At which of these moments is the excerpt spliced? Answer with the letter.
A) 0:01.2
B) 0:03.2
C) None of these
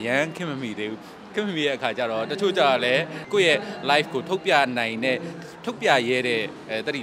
B